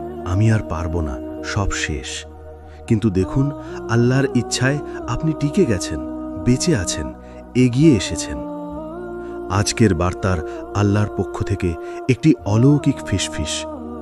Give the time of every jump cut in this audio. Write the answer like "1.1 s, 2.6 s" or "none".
none